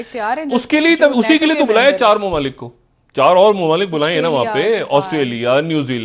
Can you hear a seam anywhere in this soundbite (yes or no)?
no